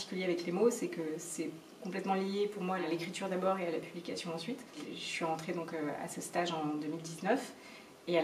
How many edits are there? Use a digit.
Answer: 2